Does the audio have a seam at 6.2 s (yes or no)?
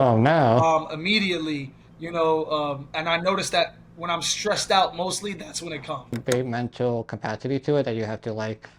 yes